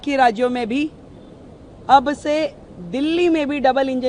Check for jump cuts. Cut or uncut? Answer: uncut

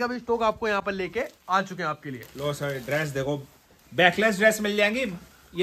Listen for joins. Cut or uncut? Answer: uncut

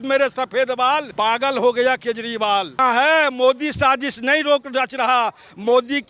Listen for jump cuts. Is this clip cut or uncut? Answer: cut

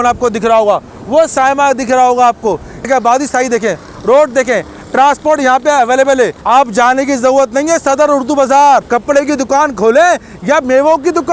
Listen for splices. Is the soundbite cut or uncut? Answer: cut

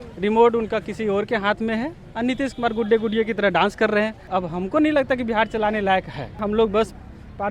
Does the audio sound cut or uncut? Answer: cut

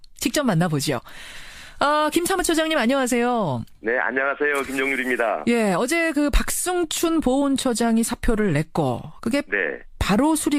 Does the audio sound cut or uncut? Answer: uncut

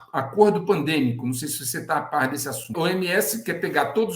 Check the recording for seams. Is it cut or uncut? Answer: cut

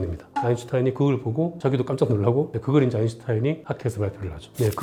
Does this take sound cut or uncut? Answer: uncut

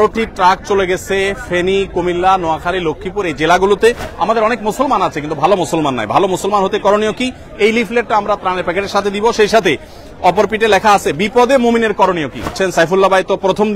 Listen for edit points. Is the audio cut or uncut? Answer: cut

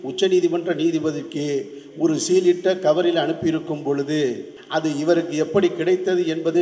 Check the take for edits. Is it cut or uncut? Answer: cut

